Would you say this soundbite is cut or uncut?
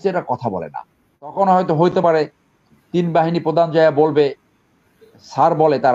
cut